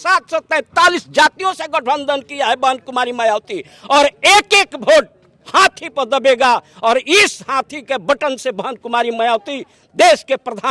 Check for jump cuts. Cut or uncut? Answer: uncut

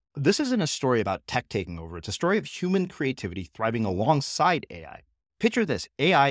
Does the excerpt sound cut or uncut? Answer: uncut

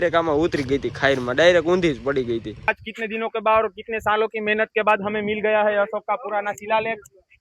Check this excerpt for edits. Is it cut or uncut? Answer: cut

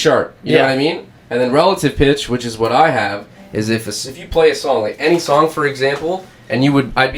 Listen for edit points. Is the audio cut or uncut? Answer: uncut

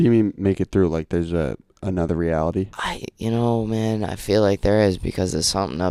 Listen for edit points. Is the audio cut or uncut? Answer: uncut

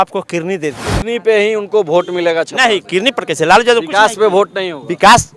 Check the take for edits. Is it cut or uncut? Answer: cut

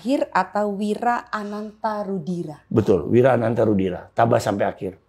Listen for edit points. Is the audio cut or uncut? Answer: uncut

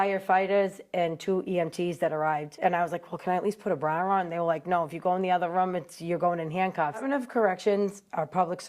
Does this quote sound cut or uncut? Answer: cut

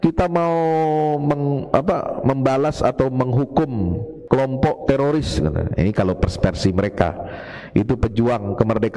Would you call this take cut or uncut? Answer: cut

